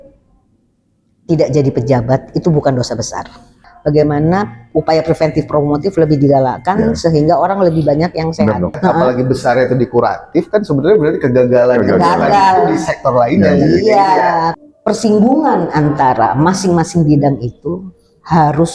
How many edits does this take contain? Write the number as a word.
three